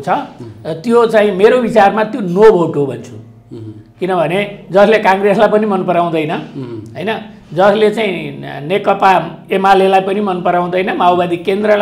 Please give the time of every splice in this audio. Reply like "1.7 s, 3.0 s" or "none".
none